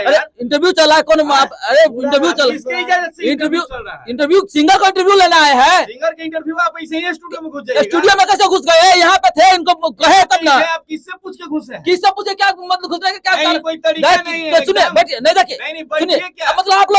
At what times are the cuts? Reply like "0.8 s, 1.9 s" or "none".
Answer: none

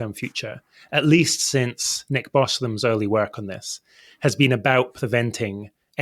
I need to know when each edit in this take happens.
none

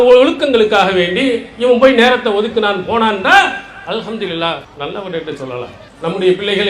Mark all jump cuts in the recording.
4.7 s, 5.8 s

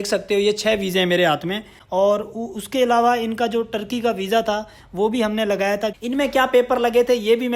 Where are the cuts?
1.7 s, 5.9 s

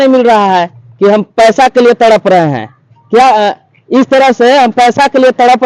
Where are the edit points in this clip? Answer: none

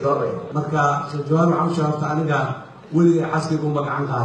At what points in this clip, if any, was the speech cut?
none

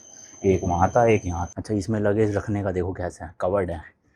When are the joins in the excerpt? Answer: 1.5 s

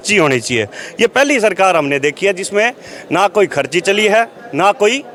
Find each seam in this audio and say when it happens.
none

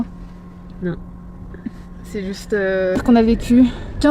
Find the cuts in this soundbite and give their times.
3.0 s

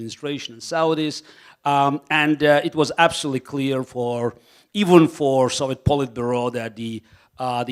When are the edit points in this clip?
none

